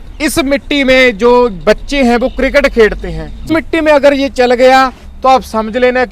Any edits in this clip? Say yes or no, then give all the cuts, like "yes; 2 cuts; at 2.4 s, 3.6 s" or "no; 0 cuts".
yes; 1 cut; at 3.5 s